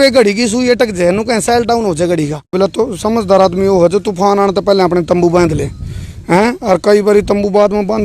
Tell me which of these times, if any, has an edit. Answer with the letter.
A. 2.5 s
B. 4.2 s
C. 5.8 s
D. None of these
A